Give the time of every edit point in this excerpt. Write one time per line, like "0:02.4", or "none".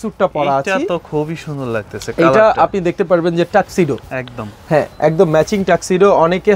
none

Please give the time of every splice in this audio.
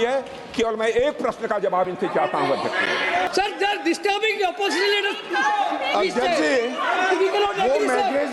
0:03.3

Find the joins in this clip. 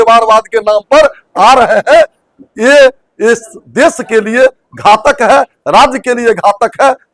none

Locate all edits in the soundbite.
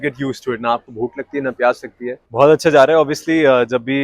0:02.2

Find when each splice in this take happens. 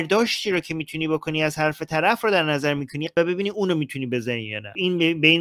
none

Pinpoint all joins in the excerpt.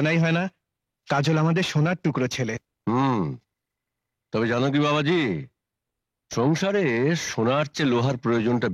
none

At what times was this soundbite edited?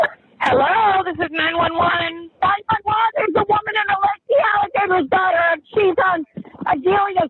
0:04.2

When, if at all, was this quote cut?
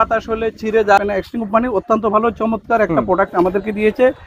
0:01.0

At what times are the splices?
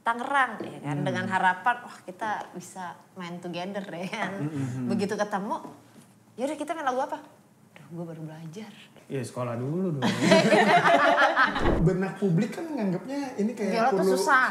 0:08.9
0:11.7

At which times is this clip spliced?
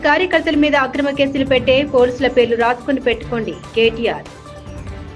none

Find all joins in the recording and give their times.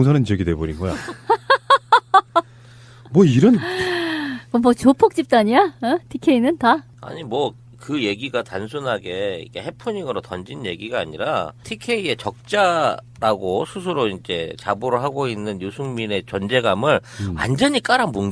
none

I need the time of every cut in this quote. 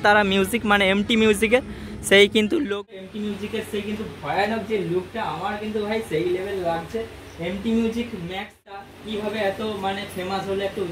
0:02.6
0:08.9

